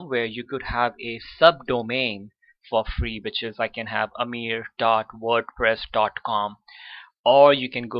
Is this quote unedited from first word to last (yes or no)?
no